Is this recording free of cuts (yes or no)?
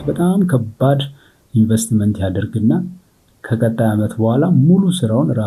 yes